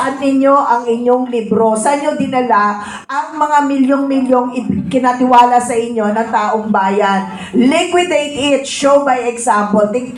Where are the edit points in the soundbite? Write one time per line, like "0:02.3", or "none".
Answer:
none